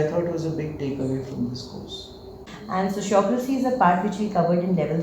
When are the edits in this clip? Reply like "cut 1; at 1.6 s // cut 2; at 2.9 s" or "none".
cut 1; at 2.4 s

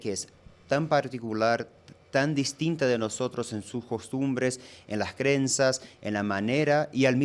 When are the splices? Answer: none

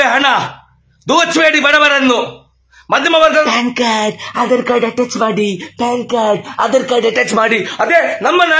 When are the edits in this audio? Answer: cut 1; at 3.4 s

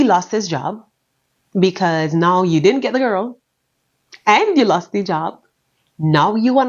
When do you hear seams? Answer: none

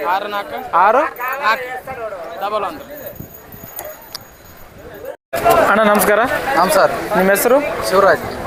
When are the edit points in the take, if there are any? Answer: none

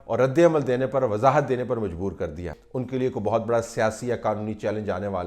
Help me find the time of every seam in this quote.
cut 1; at 2.5 s

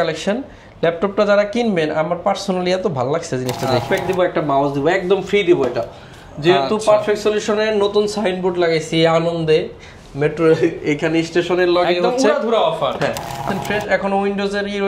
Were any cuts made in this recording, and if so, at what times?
cut 1; at 3.9 s // cut 2; at 13.5 s

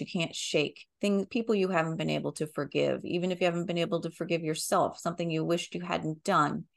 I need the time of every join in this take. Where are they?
none

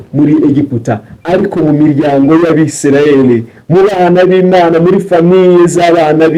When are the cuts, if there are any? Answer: none

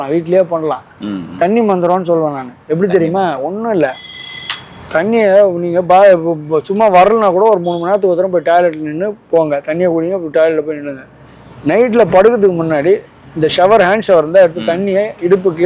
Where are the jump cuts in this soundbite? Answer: none

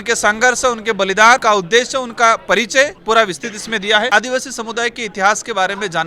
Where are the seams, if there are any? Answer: cut 1; at 1.4 s // cut 2; at 3.0 s // cut 3; at 4.1 s

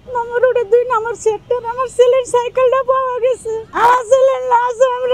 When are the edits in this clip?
cut 1; at 3.7 s

